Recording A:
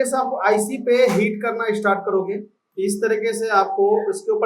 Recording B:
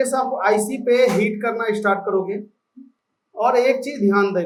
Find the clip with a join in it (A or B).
A